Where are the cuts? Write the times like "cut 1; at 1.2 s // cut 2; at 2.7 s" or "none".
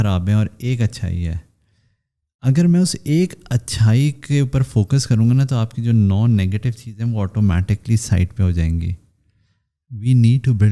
none